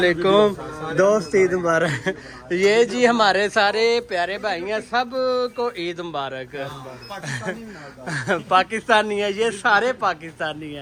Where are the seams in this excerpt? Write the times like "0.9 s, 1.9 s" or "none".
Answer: none